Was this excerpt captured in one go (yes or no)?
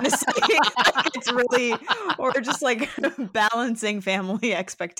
yes